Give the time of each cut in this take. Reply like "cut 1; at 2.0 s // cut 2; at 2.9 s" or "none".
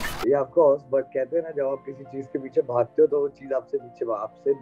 none